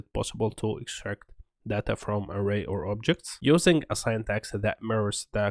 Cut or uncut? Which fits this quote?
cut